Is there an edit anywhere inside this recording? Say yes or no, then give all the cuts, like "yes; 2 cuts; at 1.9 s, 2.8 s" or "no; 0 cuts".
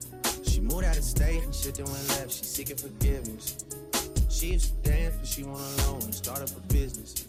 no; 0 cuts